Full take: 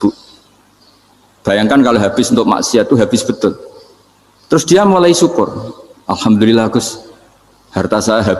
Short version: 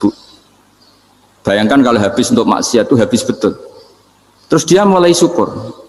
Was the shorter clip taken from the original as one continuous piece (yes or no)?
yes